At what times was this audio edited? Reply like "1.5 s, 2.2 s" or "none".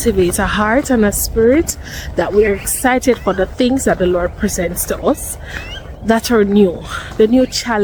none